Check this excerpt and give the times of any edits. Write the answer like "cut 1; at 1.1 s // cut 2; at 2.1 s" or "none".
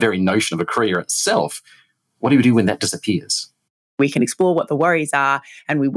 cut 1; at 4.0 s

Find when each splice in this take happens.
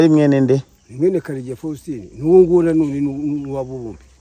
none

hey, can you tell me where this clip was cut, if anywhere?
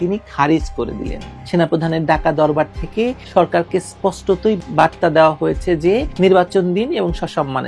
cut 1; at 1.2 s

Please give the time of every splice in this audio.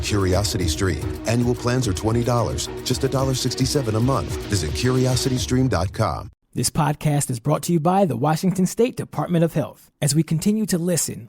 cut 1; at 6.3 s

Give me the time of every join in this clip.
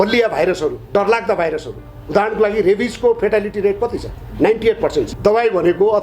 cut 1; at 5.1 s

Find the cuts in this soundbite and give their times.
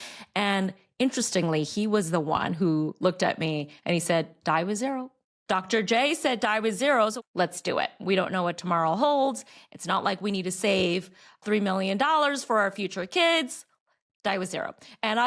cut 1; at 7.2 s // cut 2; at 11.4 s

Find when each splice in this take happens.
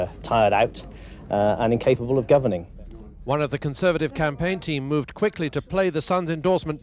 none

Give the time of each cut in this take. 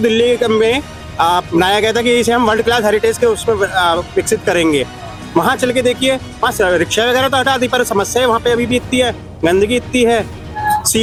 none

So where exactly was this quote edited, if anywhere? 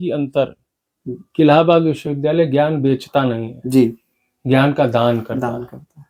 none

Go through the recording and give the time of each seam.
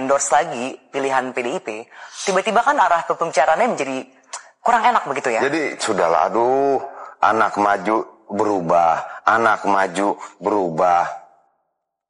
cut 1; at 5.4 s

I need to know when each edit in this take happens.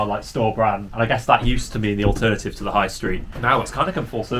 cut 1; at 0.9 s // cut 2; at 3.3 s

